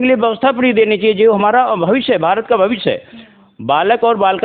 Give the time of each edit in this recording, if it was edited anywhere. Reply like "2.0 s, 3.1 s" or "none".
none